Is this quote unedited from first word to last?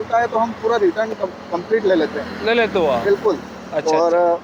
yes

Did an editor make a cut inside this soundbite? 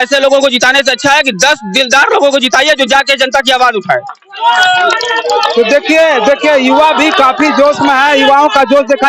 no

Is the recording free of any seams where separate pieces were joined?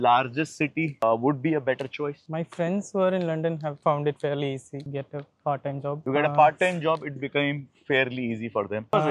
yes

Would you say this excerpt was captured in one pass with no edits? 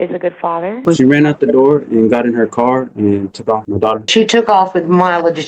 no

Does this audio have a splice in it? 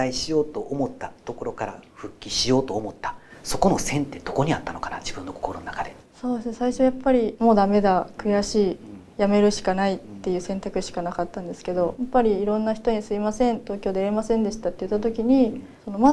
no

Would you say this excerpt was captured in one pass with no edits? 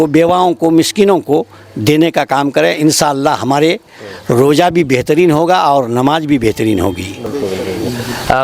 yes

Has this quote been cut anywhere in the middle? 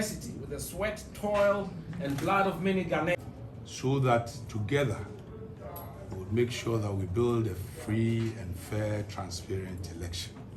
yes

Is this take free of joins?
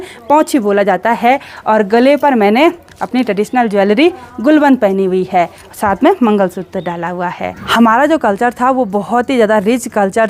yes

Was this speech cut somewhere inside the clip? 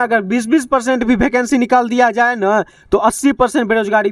no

